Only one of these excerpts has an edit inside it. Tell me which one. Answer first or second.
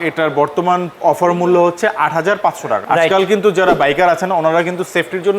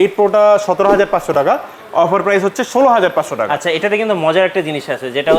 first